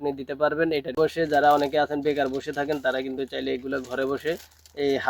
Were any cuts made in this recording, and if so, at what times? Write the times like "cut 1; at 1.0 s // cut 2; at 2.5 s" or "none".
cut 1; at 1.0 s